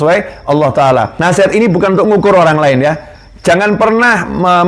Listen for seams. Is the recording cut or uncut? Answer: cut